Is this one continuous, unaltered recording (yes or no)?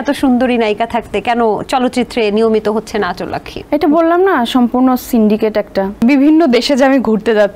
no